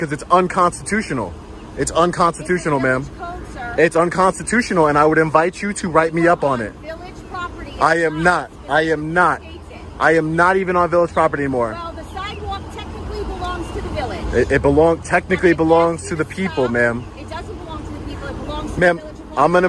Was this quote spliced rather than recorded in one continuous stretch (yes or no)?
no